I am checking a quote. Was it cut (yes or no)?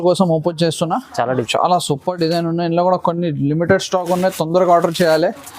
yes